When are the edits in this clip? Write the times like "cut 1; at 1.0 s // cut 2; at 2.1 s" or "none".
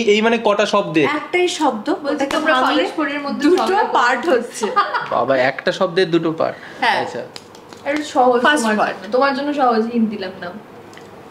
none